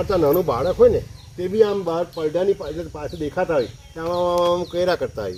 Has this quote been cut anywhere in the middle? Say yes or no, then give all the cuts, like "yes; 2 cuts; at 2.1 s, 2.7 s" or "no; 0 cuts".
no; 0 cuts